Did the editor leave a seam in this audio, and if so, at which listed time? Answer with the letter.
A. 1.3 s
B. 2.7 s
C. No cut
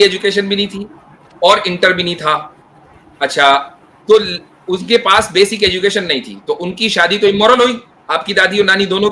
C